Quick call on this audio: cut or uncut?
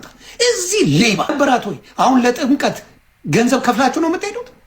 cut